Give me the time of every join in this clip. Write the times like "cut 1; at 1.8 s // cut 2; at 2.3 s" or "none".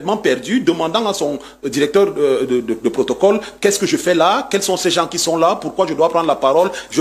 none